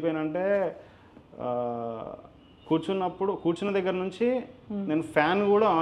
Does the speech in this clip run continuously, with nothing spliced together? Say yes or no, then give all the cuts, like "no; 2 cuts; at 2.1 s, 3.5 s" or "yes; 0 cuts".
yes; 0 cuts